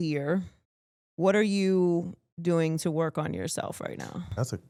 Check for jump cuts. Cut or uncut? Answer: uncut